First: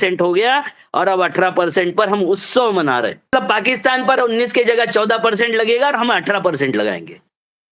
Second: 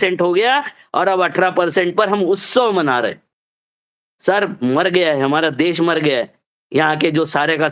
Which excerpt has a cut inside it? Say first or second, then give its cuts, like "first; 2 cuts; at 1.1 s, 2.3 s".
first; 1 cut; at 3.3 s